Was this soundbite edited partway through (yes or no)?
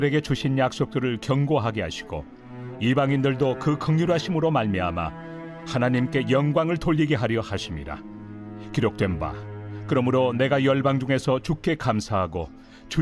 yes